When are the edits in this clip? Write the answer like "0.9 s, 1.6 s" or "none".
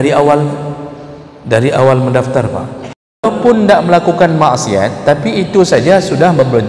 3.3 s